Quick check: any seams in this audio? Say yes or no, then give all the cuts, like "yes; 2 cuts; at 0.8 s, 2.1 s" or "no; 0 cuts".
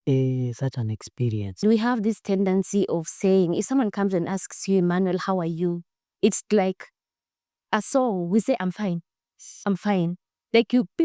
yes; 1 cut; at 1.6 s